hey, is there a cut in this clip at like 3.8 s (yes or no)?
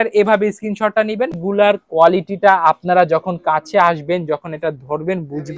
no